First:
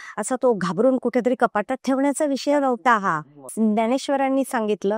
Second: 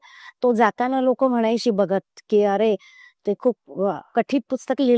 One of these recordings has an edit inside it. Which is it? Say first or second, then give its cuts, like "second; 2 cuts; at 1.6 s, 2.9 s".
first; 1 cut; at 3.5 s